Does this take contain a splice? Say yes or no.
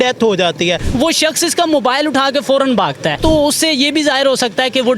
yes